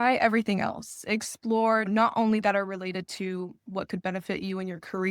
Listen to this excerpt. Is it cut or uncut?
cut